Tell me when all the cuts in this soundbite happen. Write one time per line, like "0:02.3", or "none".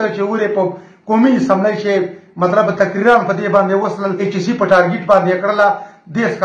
0:04.2